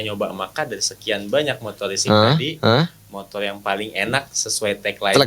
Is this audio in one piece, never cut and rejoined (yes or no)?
yes